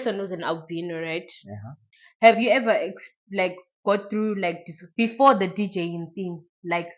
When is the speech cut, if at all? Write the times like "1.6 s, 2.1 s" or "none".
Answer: none